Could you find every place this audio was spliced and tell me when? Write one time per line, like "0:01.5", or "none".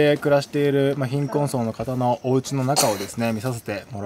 none

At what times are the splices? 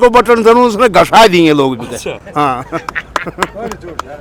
none

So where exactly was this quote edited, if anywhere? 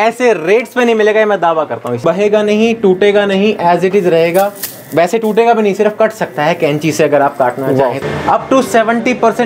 0:02.0
0:08.0

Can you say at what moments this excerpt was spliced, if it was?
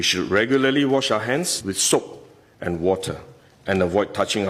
0:01.6

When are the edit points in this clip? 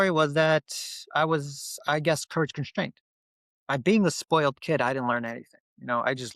none

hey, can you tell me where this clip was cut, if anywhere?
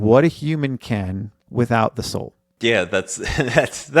none

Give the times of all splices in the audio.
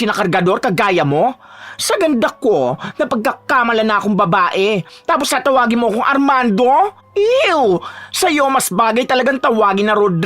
0:07.0

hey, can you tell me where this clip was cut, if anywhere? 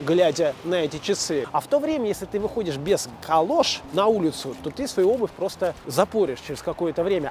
0:01.5
0:03.8
0:05.8

